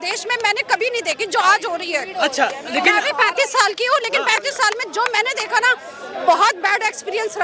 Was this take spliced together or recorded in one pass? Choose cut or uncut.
uncut